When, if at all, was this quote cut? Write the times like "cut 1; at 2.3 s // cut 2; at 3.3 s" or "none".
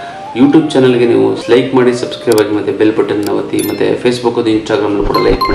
cut 1; at 1.4 s